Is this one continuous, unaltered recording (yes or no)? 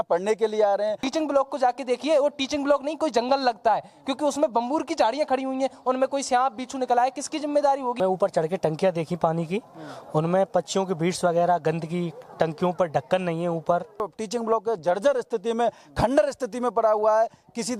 no